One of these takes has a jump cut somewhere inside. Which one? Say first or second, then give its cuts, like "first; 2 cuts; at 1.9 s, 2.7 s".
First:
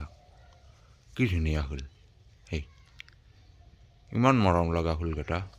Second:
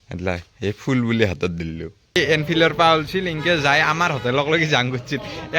second; 1 cut; at 2.2 s